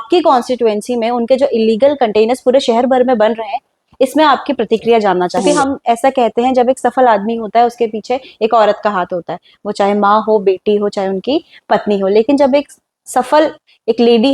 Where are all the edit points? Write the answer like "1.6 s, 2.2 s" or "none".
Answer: 5.5 s